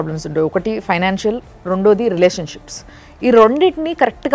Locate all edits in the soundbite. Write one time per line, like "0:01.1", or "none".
none